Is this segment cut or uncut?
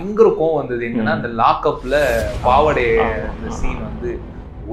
uncut